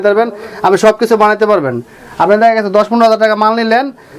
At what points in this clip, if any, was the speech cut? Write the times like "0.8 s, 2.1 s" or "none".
none